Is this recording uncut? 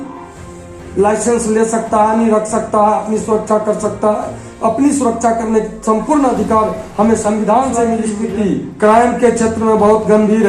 no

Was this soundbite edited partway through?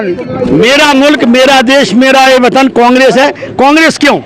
no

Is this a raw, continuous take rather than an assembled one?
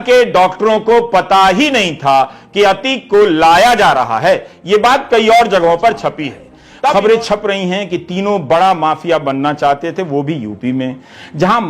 no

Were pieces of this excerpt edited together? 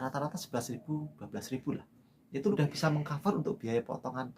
yes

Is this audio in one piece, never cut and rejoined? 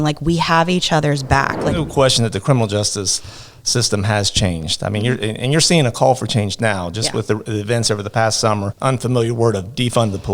no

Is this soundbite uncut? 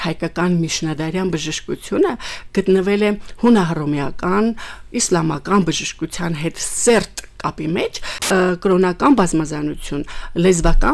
no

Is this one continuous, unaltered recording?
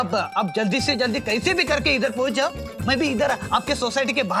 yes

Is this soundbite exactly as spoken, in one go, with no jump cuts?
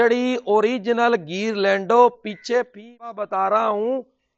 no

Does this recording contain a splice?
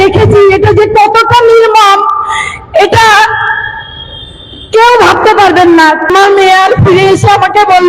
yes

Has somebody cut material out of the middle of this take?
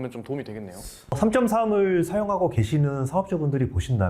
no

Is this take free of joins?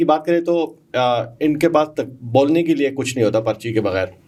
yes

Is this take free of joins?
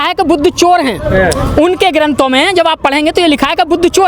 yes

